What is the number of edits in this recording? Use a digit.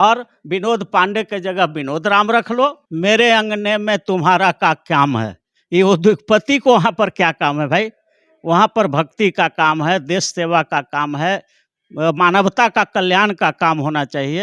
1